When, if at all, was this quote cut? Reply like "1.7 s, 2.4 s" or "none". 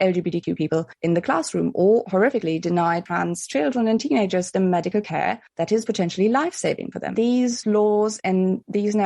7.0 s